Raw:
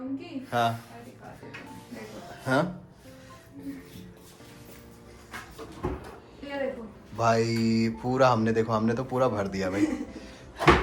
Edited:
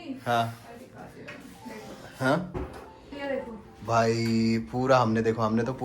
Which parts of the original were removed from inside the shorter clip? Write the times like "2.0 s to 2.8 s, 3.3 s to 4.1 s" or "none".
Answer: 2.8 s to 5.8 s